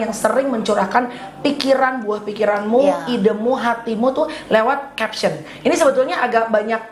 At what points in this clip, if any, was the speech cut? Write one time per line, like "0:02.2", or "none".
none